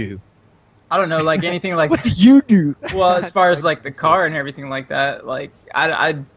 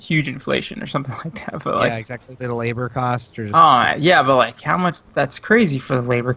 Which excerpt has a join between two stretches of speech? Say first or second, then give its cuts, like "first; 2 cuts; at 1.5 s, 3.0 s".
second; 1 cut; at 1.3 s